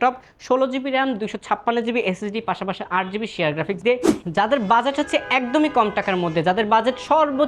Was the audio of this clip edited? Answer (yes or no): yes